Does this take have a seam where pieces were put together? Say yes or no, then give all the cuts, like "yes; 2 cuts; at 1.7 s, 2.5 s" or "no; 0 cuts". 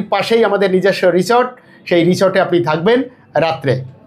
no; 0 cuts